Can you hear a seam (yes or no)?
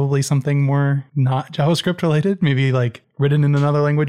yes